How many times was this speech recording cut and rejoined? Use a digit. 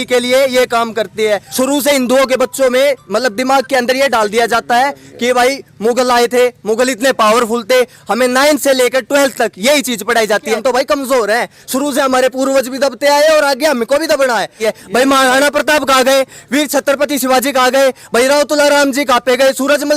3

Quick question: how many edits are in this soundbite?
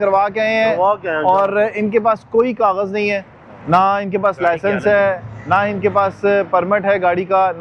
0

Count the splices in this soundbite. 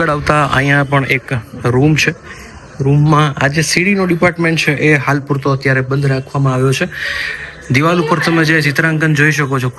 0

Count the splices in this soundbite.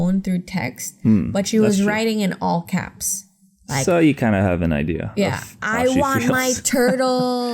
0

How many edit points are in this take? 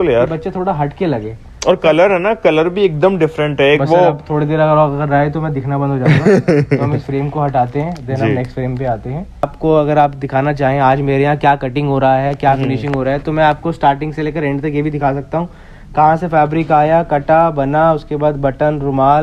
1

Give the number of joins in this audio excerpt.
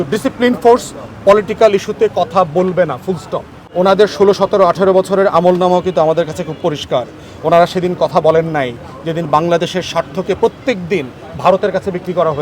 1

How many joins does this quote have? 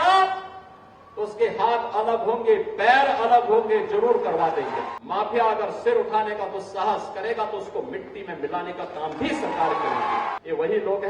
2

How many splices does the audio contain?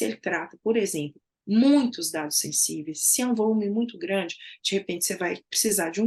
0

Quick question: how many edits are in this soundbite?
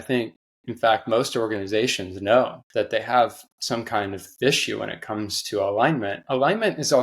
1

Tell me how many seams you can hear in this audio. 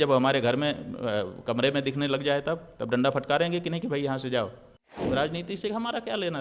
1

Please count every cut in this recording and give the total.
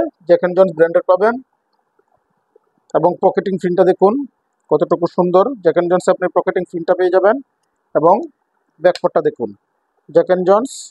0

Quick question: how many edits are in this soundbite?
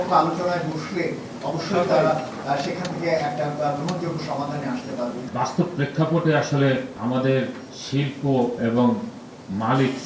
2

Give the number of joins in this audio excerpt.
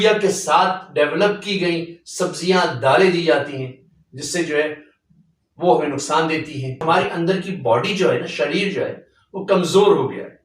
1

